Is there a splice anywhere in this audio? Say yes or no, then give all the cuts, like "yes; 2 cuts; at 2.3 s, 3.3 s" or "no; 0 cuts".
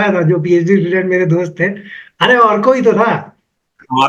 no; 0 cuts